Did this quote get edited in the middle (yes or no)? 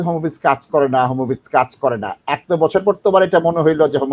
no